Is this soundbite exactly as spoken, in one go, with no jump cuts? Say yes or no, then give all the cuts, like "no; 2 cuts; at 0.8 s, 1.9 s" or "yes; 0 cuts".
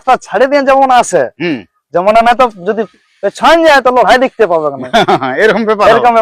yes; 0 cuts